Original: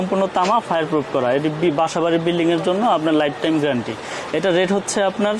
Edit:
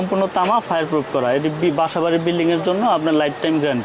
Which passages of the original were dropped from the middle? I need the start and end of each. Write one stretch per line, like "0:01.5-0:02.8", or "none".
none